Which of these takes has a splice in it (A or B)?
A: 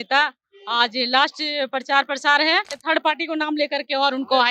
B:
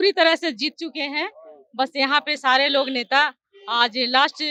A